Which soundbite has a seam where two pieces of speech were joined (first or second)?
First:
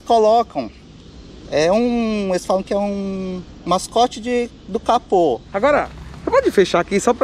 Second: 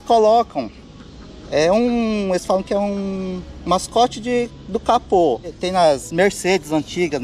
first